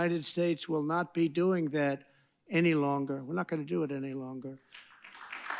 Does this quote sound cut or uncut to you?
uncut